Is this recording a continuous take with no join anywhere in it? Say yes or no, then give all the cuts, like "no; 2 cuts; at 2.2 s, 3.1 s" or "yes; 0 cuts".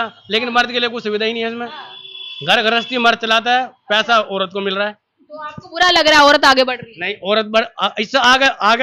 yes; 0 cuts